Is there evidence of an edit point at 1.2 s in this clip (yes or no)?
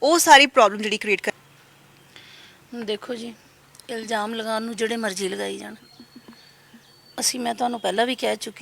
yes